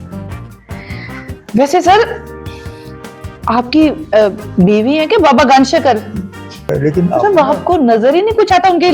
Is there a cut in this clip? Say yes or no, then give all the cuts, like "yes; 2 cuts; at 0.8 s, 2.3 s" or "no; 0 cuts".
yes; 1 cut; at 6.7 s